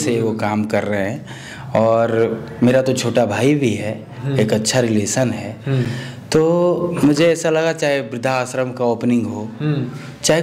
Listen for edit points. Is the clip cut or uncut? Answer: uncut